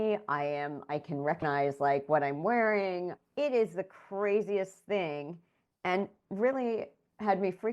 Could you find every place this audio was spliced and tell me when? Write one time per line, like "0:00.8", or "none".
0:01.4
0:03.2